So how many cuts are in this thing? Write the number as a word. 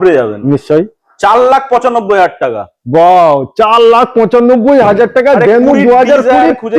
zero